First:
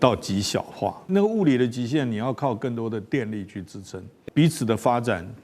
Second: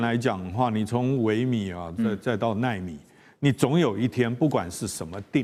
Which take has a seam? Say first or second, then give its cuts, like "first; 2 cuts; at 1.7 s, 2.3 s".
first; 2 cuts; at 1.0 s, 4.1 s